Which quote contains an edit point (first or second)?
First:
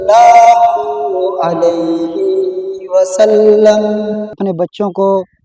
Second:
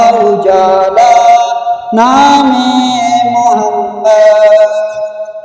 first